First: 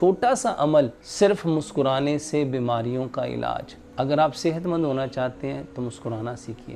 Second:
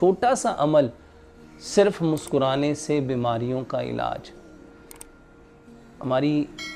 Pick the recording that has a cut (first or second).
first